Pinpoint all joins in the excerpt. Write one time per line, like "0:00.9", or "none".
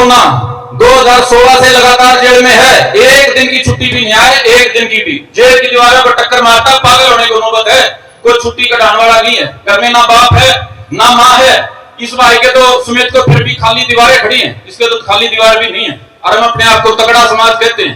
none